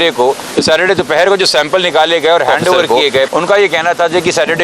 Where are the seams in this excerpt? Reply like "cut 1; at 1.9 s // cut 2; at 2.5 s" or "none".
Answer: cut 1; at 3.3 s